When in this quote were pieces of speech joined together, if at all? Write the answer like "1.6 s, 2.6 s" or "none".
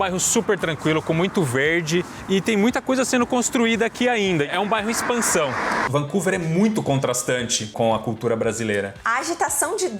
2.2 s, 4.5 s, 5.9 s, 9.0 s